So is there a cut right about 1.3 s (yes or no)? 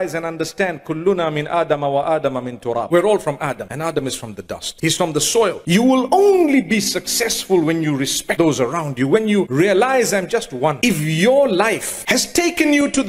no